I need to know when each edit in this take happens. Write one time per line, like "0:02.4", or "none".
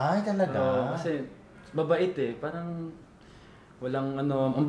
none